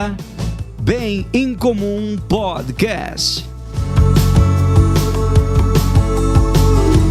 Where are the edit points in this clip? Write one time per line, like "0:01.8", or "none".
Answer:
none